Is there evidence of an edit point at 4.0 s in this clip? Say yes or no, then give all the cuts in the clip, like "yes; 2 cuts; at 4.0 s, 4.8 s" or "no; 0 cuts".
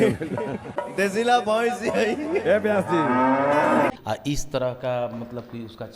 yes; 1 cut; at 4.0 s